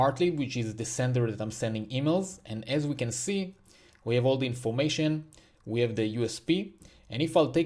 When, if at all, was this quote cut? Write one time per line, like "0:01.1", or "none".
none

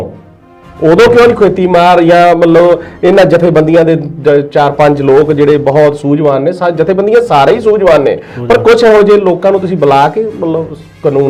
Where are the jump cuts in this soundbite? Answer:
none

